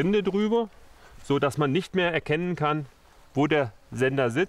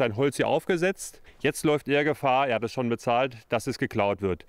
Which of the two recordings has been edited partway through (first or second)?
second